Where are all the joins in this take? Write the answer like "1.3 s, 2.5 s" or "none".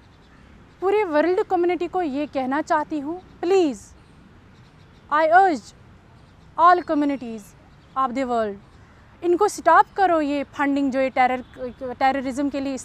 none